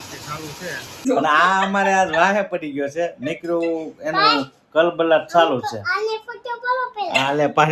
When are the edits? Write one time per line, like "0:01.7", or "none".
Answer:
0:01.1